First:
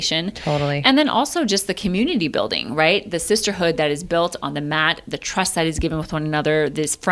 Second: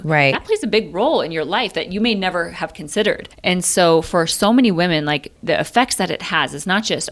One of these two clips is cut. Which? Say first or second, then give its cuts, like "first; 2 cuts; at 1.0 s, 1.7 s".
second; 2 cuts; at 3.3 s, 5.3 s